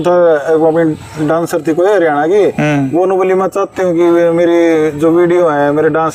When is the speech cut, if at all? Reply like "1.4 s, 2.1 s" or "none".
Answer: none